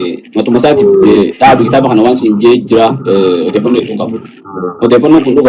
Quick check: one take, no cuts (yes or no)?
yes